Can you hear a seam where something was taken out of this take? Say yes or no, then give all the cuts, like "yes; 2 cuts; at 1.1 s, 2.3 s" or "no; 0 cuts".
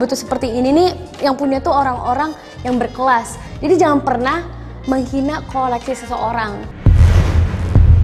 yes; 3 cuts; at 1.1 s, 3.4 s, 6.6 s